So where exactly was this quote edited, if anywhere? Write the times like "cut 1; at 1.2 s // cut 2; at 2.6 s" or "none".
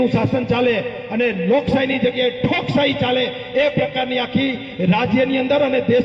none